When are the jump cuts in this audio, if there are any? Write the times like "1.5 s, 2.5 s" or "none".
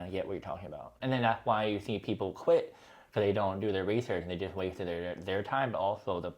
1.0 s